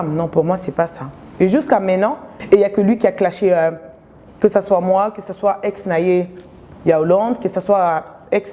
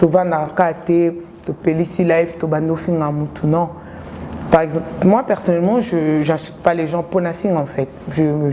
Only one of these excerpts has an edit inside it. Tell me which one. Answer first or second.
first